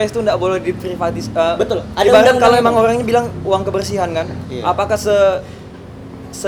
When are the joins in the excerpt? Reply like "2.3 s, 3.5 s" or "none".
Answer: none